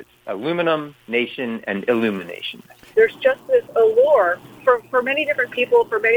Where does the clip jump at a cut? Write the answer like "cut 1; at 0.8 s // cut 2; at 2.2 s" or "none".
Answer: cut 1; at 2.9 s // cut 2; at 4.5 s

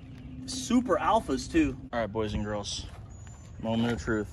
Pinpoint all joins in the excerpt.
cut 1; at 1.8 s

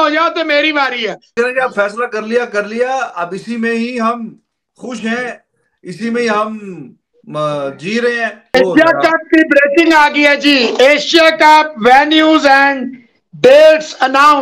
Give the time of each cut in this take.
cut 1; at 1.2 s // cut 2; at 8.4 s

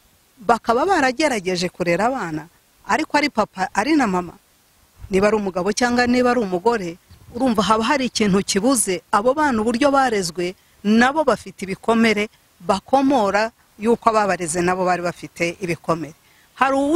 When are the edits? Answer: none

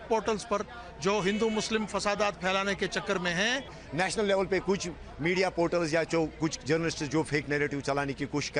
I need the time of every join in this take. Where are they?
cut 1; at 3.8 s

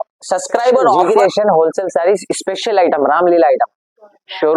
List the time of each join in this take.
cut 1; at 1.0 s

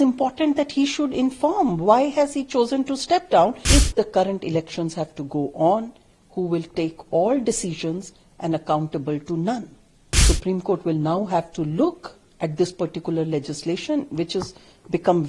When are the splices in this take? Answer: cut 1; at 3.6 s // cut 2; at 10.2 s

